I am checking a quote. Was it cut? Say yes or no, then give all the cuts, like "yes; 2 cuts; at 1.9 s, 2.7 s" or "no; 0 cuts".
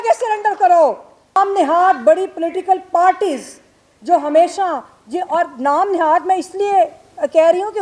yes; 1 cut; at 1.4 s